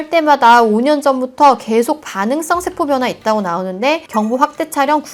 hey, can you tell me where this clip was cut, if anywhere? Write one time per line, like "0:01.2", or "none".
none